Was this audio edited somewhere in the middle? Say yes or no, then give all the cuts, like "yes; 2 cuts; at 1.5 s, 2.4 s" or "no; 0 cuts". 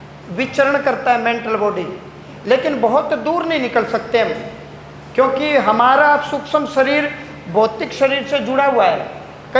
no; 0 cuts